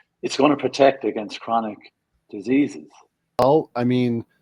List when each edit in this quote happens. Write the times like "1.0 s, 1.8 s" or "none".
3.4 s